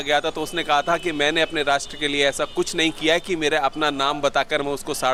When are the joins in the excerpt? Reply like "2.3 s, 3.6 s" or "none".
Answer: none